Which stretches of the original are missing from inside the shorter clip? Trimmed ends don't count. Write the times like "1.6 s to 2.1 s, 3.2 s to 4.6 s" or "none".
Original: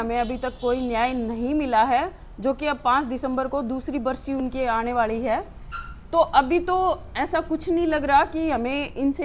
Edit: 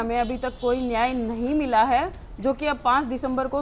none